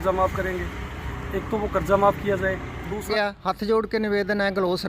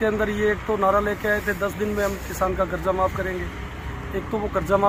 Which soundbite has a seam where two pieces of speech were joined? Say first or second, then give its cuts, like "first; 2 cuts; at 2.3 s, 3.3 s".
first; 1 cut; at 3.1 s